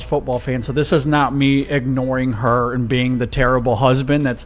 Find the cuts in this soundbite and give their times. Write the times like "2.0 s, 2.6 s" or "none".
none